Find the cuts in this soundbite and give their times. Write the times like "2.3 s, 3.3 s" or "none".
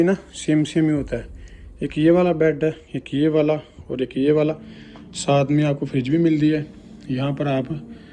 none